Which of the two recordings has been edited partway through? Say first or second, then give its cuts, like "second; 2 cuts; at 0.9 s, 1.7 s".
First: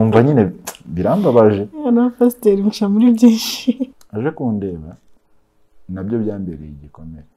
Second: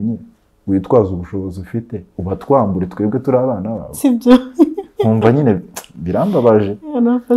first; 1 cut; at 3.9 s